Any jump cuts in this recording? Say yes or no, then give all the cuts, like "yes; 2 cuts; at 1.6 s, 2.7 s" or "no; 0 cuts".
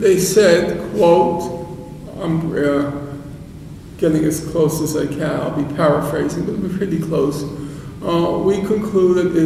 no; 0 cuts